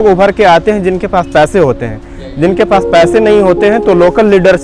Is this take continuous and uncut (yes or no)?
yes